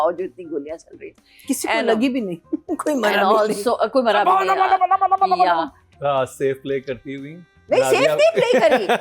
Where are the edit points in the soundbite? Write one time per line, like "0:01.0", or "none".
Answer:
0:05.8